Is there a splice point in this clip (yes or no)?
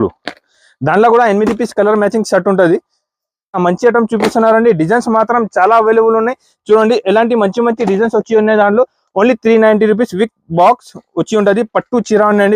yes